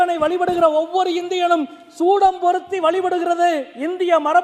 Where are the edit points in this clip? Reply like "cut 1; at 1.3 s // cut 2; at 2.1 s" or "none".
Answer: none

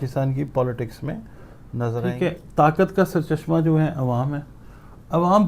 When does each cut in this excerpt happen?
cut 1; at 2.0 s

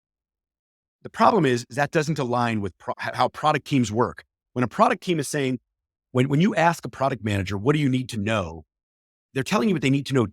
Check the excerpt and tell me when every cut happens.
cut 1; at 2.9 s

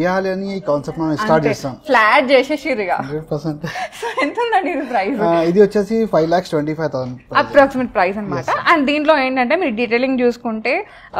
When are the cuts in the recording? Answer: none

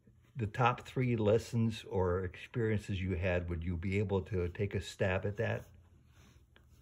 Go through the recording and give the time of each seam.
none

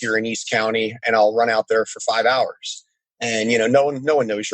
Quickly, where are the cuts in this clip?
cut 1; at 1.0 s

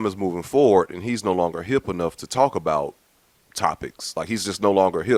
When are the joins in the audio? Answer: none

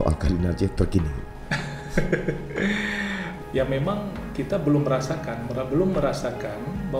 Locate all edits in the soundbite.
cut 1; at 3.3 s

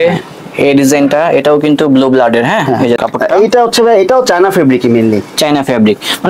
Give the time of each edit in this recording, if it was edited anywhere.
cut 1; at 3.0 s

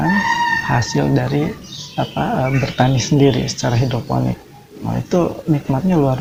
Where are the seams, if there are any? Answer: none

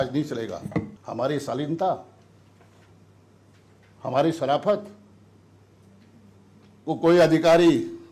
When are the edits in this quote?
cut 1; at 1.0 s

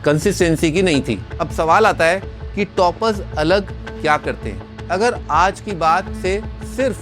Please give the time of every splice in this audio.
cut 1; at 1.2 s // cut 2; at 4.7 s

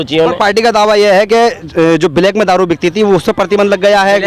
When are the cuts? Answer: none

